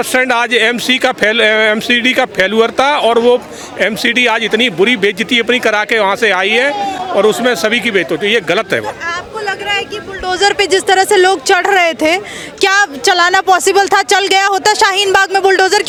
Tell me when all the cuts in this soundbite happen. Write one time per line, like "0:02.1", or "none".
none